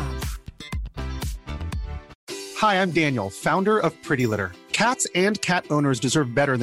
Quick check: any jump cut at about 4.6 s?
no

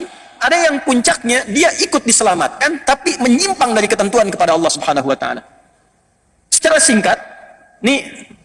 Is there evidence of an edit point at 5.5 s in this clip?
no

